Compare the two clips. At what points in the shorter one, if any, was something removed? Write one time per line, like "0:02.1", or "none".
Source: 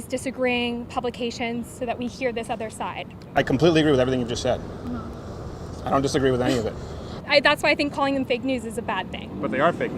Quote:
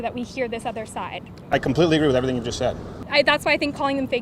0:02.9